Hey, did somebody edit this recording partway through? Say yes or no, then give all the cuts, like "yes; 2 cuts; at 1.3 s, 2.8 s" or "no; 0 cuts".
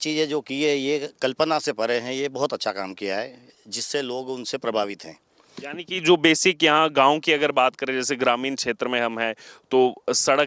no; 0 cuts